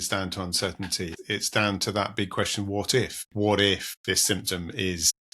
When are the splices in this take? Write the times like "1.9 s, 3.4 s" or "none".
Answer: 1.2 s, 3.2 s, 3.9 s